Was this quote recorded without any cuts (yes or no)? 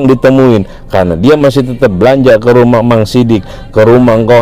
yes